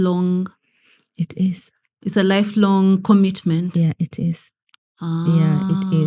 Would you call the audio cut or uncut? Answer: uncut